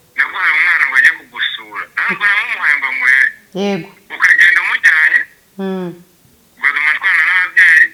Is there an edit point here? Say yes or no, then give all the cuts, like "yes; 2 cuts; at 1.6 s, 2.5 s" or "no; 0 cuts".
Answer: no; 0 cuts